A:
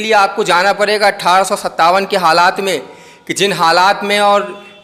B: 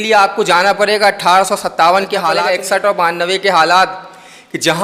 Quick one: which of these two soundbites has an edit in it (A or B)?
B